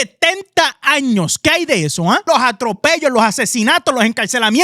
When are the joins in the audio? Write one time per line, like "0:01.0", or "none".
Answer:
0:02.2